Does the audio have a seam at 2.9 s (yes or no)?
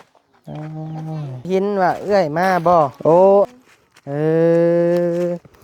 yes